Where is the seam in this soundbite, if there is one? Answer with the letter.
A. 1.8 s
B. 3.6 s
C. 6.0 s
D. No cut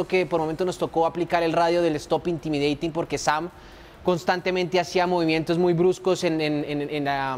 D